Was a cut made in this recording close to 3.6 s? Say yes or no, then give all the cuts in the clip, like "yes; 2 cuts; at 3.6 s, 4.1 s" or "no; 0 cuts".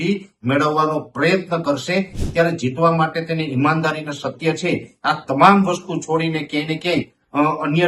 no; 1 cut; at 2.2 s